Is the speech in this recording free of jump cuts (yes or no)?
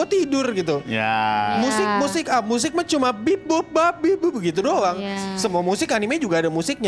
yes